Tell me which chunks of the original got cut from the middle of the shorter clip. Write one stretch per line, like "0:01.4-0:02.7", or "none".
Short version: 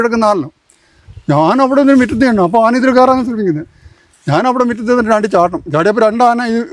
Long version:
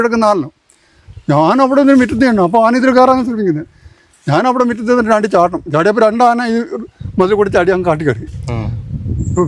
none

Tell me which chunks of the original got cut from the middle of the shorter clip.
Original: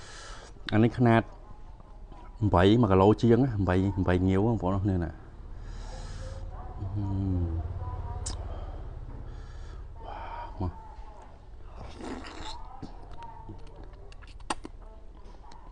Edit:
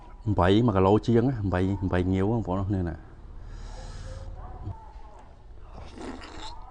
0:06.9-0:10.8

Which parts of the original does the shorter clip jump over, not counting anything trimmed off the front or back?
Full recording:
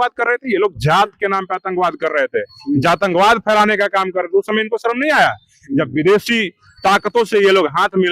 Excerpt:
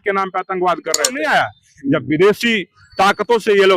0:02.2-0:04.9

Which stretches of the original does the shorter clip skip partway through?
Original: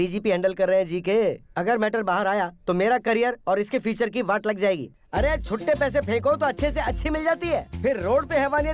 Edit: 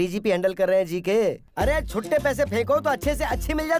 0:01.4-0:05.0

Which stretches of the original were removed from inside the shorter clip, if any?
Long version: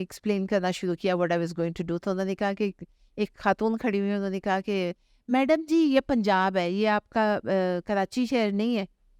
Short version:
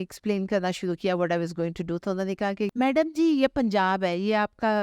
0:02.7-0:05.2

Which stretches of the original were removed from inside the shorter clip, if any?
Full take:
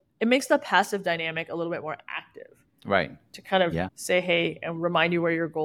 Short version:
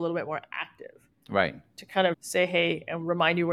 0:03.7-0:03.9

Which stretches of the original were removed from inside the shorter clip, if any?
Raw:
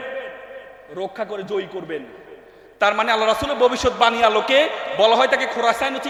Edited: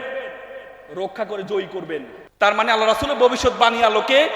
0:02.2-0:02.6

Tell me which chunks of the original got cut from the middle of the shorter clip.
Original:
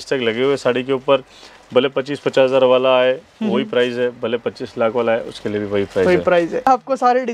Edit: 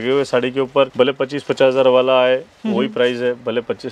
0:01.2-0:01.7

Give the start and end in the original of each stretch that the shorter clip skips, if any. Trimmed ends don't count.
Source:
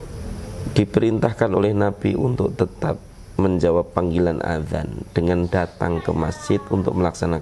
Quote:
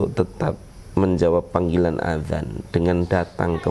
none

